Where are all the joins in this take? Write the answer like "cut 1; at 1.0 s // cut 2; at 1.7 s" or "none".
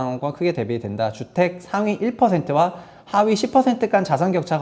none